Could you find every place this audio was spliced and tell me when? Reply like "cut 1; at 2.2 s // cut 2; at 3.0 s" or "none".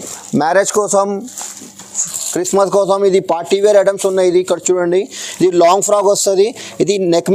none